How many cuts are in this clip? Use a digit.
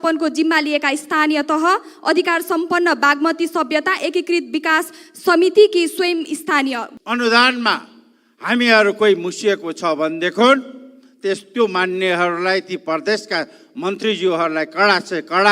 1